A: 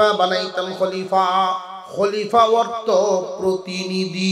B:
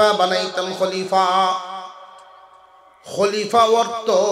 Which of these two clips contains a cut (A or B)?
A